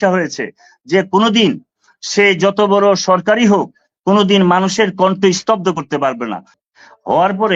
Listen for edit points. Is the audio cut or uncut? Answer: cut